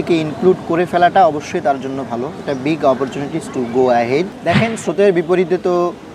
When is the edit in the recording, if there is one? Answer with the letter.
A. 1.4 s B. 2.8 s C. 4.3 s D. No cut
C